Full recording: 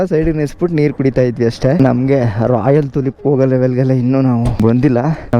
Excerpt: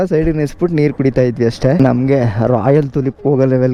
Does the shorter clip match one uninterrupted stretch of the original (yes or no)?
yes